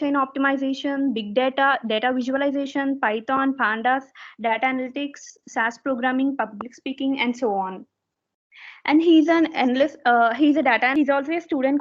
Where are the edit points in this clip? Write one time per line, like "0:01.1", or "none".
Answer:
0:10.9